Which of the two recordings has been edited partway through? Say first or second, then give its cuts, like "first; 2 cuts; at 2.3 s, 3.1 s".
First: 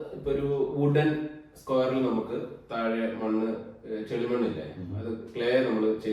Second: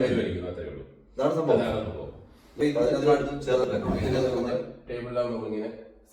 second; 1 cut; at 3.2 s